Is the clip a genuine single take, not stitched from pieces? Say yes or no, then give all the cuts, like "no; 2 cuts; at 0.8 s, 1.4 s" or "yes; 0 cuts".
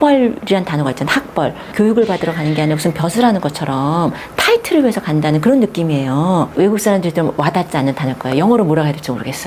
no; 2 cuts; at 1.6 s, 6.5 s